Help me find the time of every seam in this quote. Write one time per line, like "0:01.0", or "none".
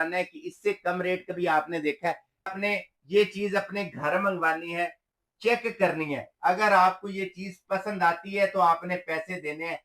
0:02.6